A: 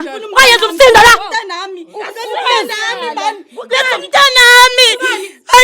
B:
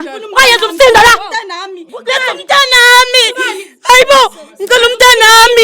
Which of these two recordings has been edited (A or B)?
B